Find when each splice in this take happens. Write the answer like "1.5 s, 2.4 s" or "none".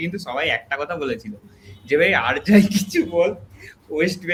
none